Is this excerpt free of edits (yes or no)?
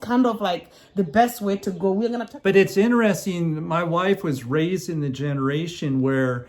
no